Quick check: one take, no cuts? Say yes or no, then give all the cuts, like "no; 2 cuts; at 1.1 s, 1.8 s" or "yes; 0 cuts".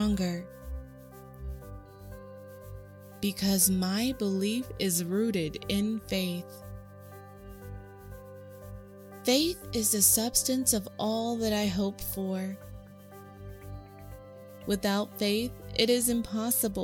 yes; 0 cuts